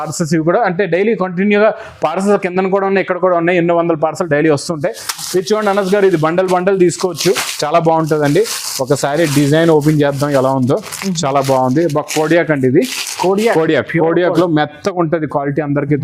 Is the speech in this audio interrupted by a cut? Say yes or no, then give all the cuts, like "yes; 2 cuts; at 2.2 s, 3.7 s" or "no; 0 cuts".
no; 0 cuts